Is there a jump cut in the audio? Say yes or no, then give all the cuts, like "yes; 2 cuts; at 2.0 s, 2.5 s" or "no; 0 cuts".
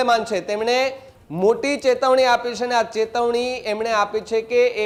no; 0 cuts